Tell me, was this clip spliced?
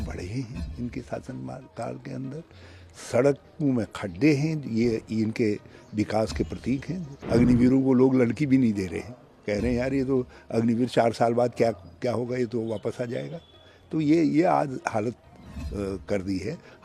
yes; 1 cut; at 7.2 s

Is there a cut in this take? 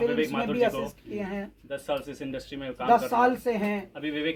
no; 0 cuts

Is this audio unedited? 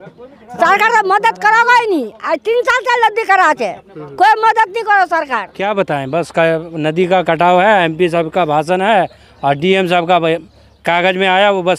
no; 1 cut; at 5.5 s

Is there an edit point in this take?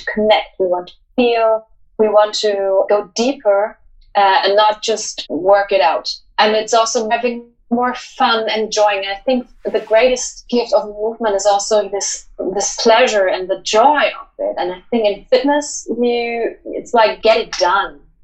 yes; 6 cuts; at 2.9 s, 5.1 s, 6.2 s, 7.1 s, 10.4 s, 17.2 s

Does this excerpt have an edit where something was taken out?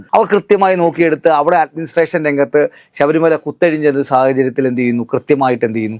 no; 0 cuts

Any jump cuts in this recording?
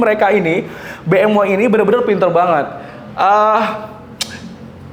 no; 0 cuts

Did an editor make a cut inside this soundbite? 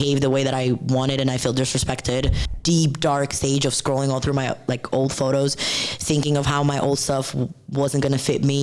yes; 1 cut; at 2.4 s

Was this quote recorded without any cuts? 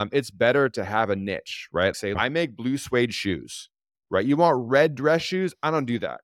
no; 1 cut; at 2.2 s

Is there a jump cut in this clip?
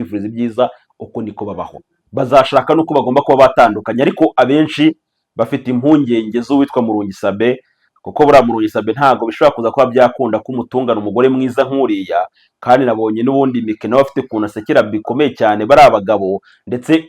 yes; 1 cut; at 2.0 s

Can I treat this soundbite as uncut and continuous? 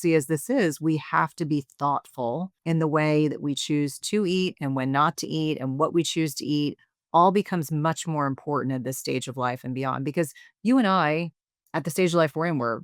no; 1 cut; at 2.5 s

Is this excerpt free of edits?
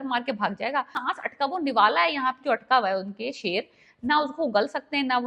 no; 1 cut; at 1.0 s

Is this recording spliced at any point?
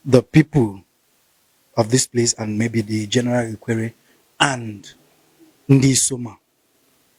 no; 0 cuts

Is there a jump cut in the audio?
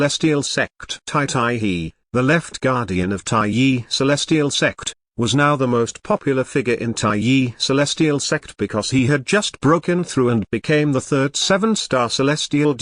yes; 1 cut; at 0.9 s

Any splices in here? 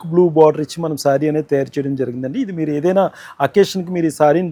no; 0 cuts

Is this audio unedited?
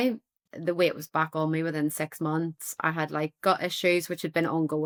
yes; 0 cuts

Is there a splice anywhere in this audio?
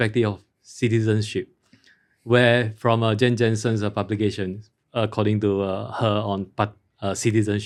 no; 0 cuts

